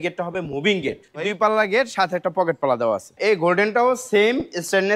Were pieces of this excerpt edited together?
yes; 2 cuts; at 1.2 s, 3.1 s

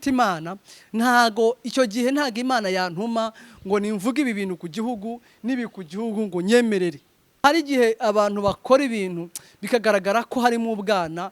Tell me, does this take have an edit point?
yes; 1 cut; at 7.4 s

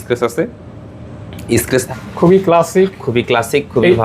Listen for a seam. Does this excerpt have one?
yes; 1 cut; at 1.9 s

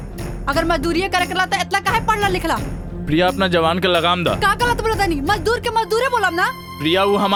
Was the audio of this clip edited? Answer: no; 0 cuts

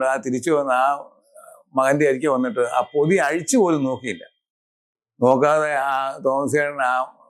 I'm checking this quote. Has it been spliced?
no; 0 cuts

